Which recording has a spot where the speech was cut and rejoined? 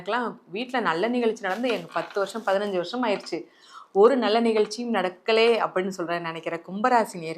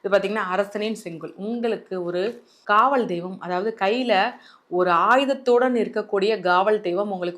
second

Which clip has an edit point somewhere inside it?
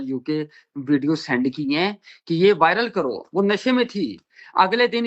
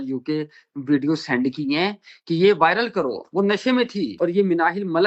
second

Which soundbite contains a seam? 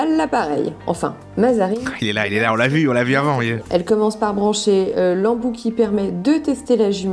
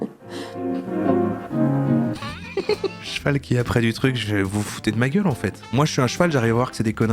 first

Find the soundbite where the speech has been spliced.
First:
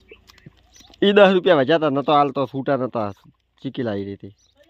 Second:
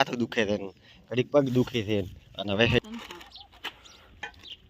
second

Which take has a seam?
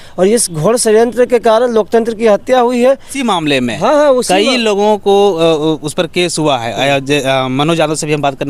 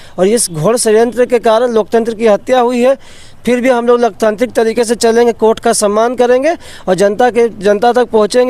first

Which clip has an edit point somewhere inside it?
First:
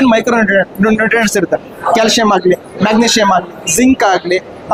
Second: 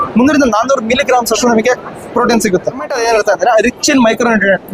second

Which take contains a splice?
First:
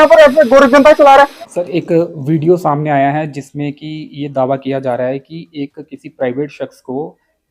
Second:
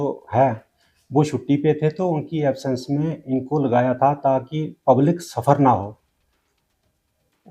first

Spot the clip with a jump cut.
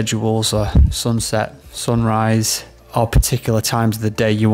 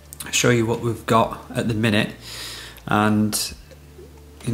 first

